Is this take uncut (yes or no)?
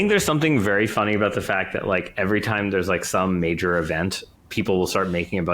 no